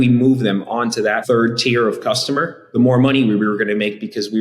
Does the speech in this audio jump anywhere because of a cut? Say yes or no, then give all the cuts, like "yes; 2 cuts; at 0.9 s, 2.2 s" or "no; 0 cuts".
yes; 2 cuts; at 1.2 s, 2.6 s